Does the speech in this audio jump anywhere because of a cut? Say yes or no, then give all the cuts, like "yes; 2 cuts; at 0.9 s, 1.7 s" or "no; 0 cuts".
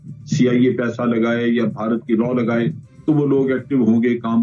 no; 0 cuts